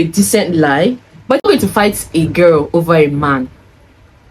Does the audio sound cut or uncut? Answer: cut